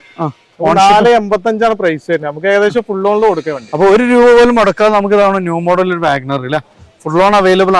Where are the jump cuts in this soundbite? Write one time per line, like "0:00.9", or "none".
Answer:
none

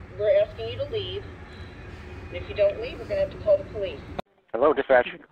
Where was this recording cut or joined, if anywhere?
0:04.1

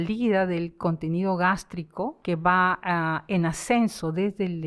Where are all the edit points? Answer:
0:02.2

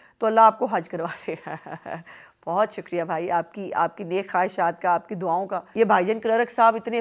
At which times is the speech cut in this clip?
0:05.6

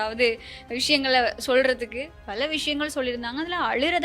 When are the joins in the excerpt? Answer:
0:02.1

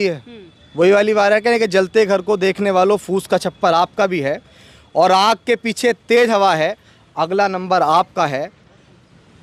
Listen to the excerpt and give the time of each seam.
none

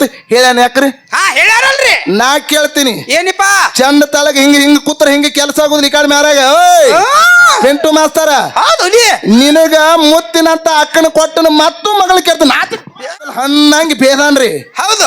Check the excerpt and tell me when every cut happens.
0:13.3

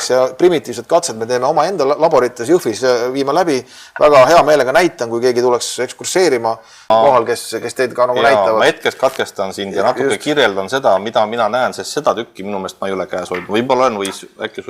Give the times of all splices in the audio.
0:06.9

